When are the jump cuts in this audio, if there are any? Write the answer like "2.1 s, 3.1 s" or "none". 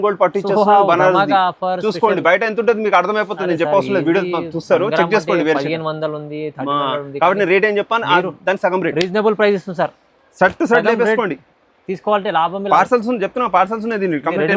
none